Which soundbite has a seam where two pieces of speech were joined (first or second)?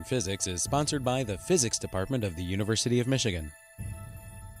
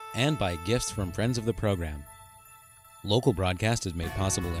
first